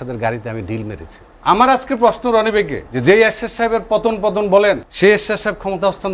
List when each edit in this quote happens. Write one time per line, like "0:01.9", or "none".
0:01.3
0:02.8
0:04.9